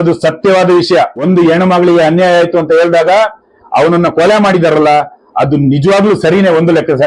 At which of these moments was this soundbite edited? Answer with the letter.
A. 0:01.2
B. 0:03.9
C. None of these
A